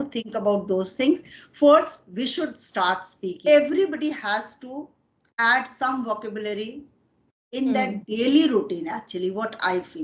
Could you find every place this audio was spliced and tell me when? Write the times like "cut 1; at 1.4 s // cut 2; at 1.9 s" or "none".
cut 1; at 3.4 s